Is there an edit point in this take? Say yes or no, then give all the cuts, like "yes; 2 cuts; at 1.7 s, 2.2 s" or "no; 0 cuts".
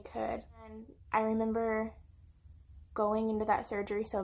yes; 1 cut; at 0.9 s